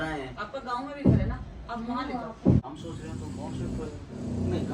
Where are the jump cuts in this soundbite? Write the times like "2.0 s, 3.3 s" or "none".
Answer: 2.6 s

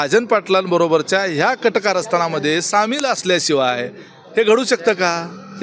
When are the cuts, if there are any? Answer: none

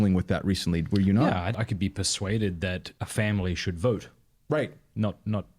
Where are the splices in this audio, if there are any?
1.5 s, 2.9 s

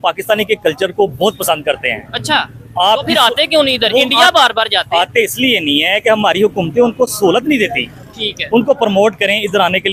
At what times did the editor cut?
none

